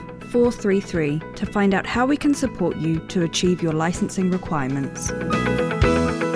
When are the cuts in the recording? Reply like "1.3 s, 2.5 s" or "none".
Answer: 5.1 s